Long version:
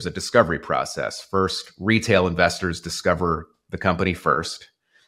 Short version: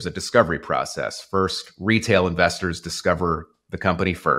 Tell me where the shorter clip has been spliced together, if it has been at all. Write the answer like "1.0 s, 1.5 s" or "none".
none